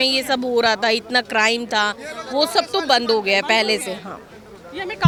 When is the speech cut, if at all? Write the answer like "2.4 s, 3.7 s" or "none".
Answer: none

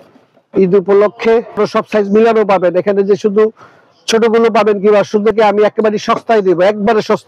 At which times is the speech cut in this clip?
1.6 s, 5.3 s

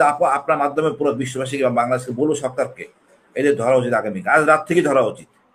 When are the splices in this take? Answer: none

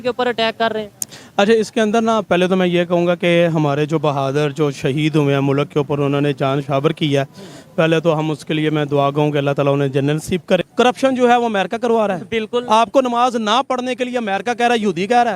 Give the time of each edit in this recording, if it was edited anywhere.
10.7 s

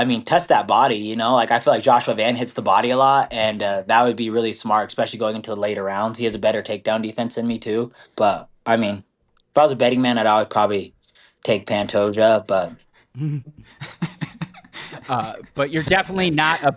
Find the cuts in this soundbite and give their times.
8.1 s, 15.8 s

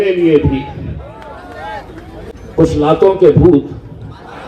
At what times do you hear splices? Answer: 2.3 s

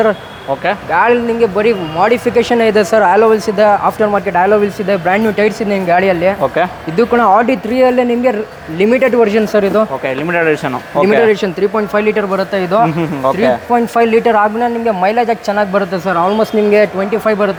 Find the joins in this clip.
none

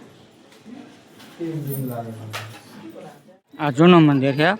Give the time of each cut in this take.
3.7 s

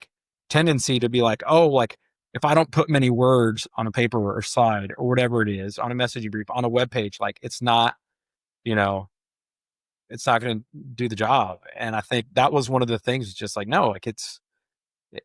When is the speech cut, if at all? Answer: none

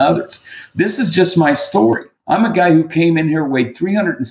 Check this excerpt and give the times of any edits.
2.1 s

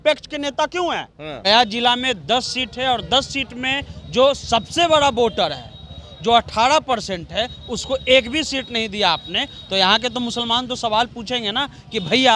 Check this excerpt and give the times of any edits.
1.4 s

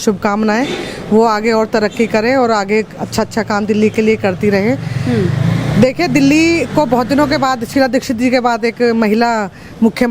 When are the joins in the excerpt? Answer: none

